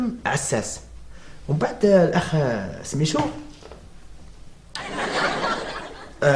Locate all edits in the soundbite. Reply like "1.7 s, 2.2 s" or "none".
none